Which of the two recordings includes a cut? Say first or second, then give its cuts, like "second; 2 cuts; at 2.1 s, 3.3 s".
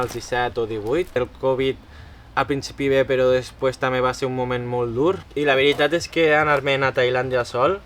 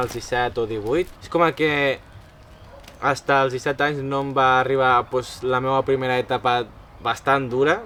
first; 2 cuts; at 1.2 s, 5.3 s